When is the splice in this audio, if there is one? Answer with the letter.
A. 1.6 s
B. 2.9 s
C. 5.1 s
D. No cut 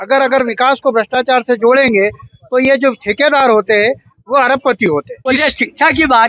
C